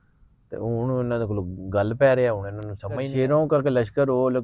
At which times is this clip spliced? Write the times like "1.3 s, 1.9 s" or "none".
3.1 s